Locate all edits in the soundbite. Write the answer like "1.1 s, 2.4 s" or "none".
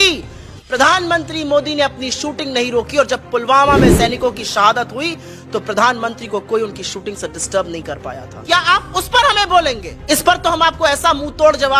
8.3 s, 9.9 s